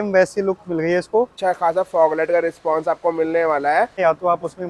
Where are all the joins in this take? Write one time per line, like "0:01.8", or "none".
0:01.3
0:03.9